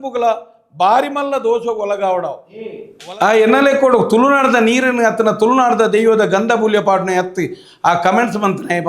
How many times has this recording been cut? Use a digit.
1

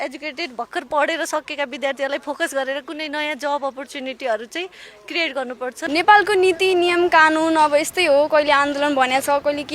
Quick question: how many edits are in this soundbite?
1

